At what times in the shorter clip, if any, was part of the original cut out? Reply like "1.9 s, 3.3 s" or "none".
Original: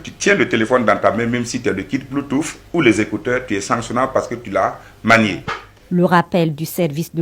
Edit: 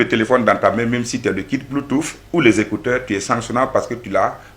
none